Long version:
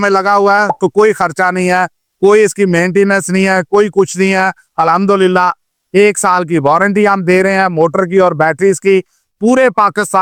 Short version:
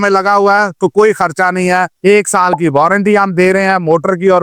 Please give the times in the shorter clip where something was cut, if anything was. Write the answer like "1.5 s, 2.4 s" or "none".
1.9 s